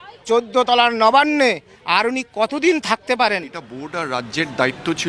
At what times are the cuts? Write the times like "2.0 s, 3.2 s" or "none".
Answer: 3.8 s